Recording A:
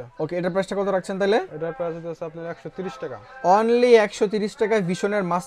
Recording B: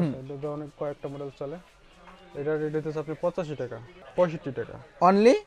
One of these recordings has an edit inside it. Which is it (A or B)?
B